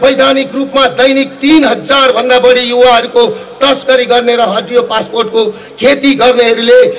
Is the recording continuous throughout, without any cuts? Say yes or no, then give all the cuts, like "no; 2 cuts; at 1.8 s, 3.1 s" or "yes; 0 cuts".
yes; 0 cuts